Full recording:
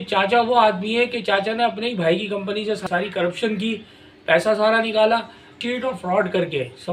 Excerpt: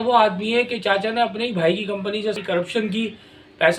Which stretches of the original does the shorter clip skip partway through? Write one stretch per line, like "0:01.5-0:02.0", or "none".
0:02.8-0:03.1

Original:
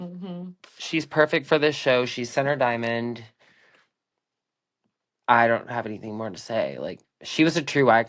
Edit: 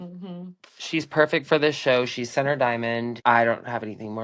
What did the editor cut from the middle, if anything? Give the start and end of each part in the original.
0:03.2-0:05.2

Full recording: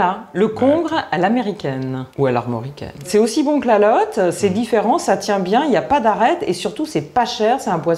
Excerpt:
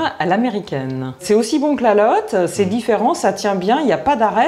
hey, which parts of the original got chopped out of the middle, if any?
0:02.0-0:02.9

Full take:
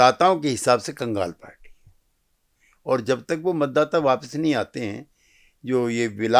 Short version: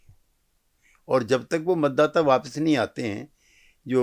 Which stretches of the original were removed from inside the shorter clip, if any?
none

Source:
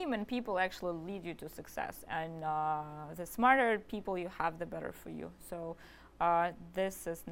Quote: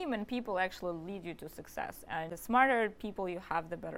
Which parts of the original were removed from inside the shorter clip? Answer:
0:02.3-0:03.2

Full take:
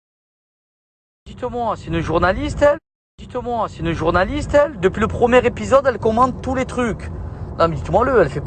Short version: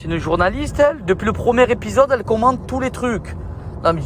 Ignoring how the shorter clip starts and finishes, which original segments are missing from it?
0:02.8-0:04.7

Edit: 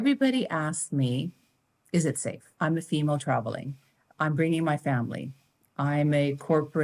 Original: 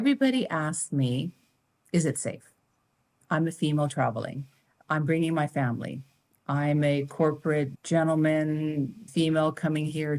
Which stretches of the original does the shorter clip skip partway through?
0:02.4-0:03.1

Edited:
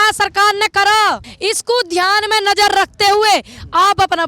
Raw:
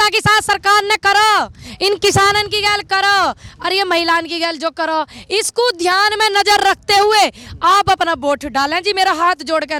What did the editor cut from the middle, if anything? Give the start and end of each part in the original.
0:01.6-0:05.2

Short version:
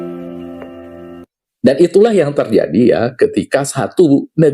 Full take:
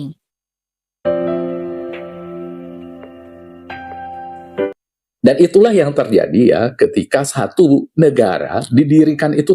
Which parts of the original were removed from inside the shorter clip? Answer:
0:03.6-0:04.8

